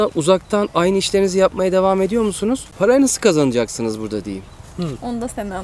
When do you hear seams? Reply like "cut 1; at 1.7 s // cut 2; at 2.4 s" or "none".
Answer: none